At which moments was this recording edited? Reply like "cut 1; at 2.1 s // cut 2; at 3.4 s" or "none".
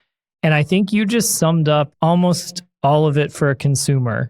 cut 1; at 1.9 s